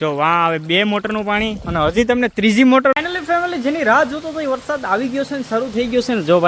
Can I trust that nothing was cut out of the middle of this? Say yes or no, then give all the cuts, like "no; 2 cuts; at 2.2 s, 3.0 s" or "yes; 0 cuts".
no; 1 cut; at 2.9 s